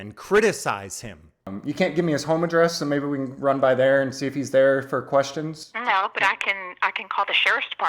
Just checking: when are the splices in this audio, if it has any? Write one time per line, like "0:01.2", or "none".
0:01.5